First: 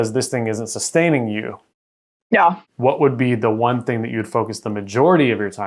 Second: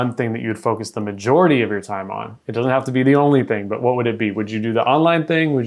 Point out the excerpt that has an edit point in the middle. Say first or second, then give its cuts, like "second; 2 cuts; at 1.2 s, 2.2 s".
first; 1 cut; at 2.7 s